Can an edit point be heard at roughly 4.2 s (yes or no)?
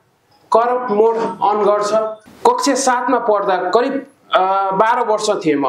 no